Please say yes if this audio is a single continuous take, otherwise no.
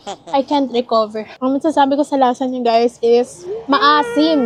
yes